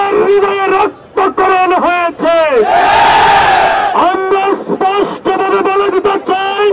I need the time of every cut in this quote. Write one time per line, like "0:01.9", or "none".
none